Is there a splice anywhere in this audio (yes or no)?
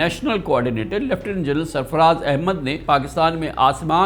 yes